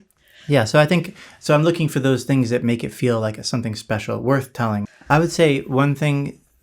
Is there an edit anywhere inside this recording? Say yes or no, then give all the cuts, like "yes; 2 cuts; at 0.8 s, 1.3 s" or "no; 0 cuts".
yes; 1 cut; at 4.9 s